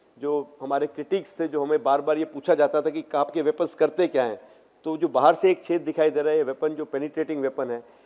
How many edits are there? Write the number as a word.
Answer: zero